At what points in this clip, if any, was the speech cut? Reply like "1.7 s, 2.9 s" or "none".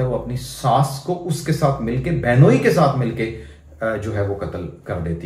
none